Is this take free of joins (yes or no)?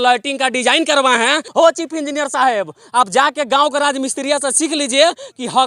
no